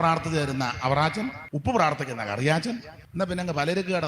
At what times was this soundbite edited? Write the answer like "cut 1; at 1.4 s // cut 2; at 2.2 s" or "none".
cut 1; at 1.4 s // cut 2; at 3.0 s